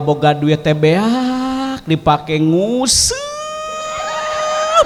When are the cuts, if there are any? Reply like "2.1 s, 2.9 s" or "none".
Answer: none